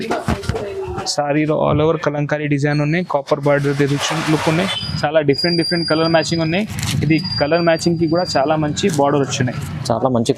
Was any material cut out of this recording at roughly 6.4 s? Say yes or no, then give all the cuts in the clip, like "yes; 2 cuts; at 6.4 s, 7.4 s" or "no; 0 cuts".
no; 1 cut; at 4.7 s